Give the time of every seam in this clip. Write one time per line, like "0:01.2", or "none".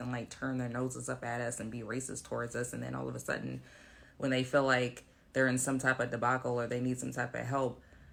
none